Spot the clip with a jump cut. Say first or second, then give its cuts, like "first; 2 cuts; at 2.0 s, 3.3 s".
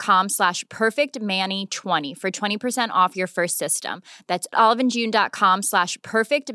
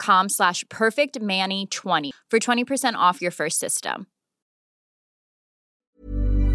second; 1 cut; at 2.1 s